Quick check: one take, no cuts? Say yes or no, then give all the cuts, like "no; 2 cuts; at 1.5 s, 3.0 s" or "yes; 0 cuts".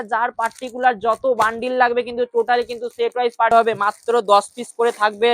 no; 1 cut; at 3.5 s